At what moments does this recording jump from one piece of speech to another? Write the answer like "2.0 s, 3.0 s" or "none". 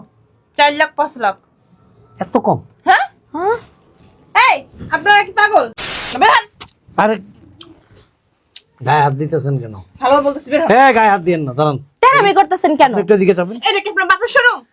6.1 s